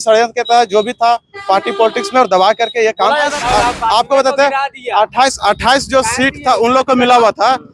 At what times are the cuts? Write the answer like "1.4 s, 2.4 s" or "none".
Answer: 3.3 s